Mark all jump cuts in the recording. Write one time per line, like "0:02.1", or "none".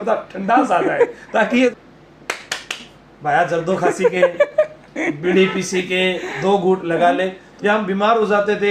0:01.5
0:07.4